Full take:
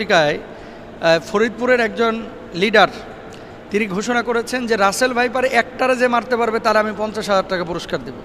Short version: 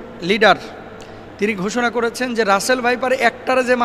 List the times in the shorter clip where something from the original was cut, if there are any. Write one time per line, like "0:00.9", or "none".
none